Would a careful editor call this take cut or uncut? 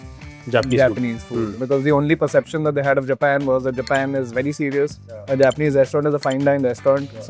uncut